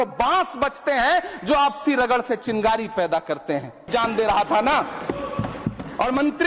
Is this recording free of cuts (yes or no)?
no